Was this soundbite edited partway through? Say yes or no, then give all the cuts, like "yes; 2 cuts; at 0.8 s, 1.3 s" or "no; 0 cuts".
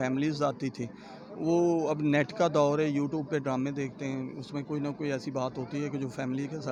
no; 0 cuts